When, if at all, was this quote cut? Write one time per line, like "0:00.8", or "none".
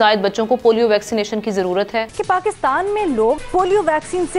0:02.1
0:03.4